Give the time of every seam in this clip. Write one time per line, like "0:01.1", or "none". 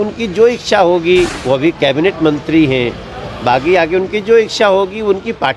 0:01.4